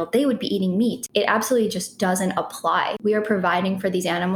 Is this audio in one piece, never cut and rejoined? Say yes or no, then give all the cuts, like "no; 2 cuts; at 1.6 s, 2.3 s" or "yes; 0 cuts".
no; 2 cuts; at 1.0 s, 3.0 s